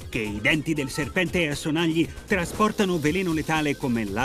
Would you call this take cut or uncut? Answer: uncut